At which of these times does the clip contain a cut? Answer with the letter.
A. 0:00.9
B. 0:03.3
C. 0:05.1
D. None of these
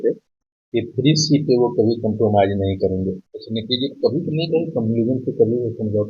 B